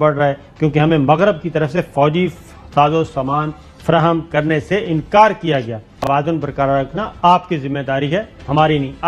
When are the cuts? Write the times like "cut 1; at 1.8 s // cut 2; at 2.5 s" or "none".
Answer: none

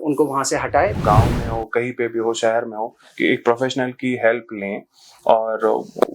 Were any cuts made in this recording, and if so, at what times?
cut 1; at 1.0 s

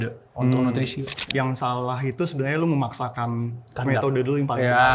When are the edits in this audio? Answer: cut 1; at 1.3 s

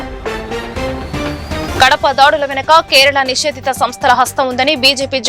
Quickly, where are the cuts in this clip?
cut 1; at 1.7 s

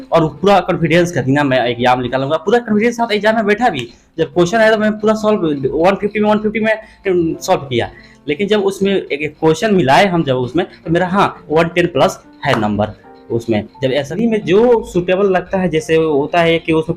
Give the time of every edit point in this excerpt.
cut 1; at 14.2 s

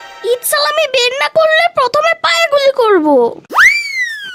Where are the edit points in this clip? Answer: none

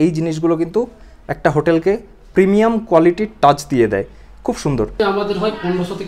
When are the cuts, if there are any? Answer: cut 1; at 5.0 s

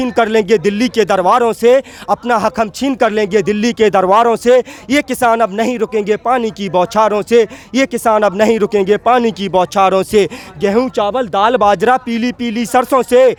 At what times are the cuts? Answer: none

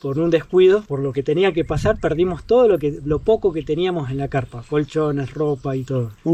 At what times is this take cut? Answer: none

